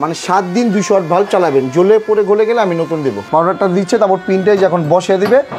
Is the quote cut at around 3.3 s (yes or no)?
yes